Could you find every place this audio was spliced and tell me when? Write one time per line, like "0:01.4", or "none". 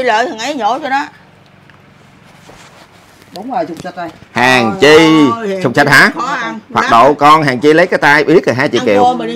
none